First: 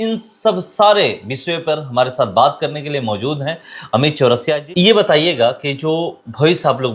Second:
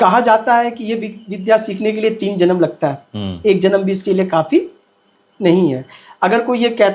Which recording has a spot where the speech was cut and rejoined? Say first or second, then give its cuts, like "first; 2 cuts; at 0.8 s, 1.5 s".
first; 1 cut; at 4.5 s